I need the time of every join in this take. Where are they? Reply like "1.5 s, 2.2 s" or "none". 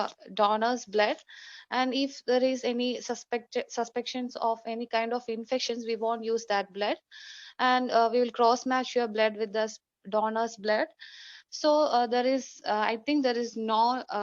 5.1 s